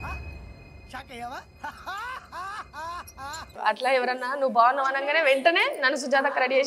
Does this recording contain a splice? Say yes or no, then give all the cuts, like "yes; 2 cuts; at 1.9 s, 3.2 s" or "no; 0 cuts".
yes; 1 cut; at 3.6 s